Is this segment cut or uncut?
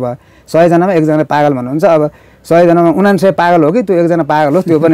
uncut